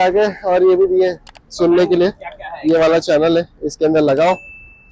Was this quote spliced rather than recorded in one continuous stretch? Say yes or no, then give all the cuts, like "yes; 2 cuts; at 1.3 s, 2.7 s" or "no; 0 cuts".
no; 0 cuts